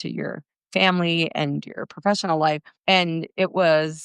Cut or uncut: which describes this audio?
cut